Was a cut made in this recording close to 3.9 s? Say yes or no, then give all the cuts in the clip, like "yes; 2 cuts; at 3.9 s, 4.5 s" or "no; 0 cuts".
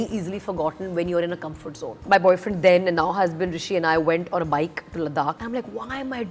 no; 2 cuts; at 2.0 s, 5.4 s